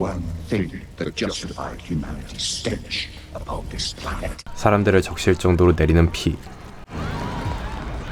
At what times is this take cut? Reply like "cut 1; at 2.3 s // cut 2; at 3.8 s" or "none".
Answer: cut 1; at 4.5 s